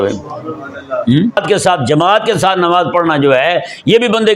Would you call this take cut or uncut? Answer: cut